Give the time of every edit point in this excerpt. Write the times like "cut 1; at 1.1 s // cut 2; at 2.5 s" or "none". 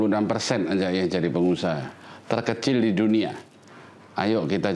none